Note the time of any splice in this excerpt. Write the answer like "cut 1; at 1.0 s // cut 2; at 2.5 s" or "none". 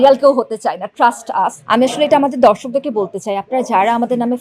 cut 1; at 1.6 s